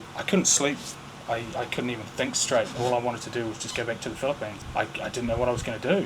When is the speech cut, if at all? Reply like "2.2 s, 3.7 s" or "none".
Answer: none